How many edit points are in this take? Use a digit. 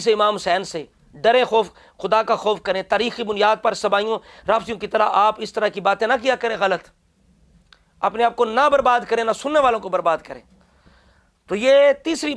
0